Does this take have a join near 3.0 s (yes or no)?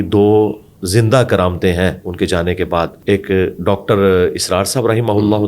yes